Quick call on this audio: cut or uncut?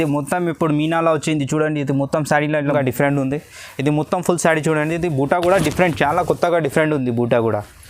cut